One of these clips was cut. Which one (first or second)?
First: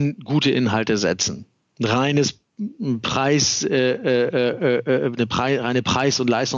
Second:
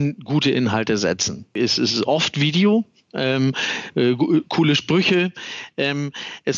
second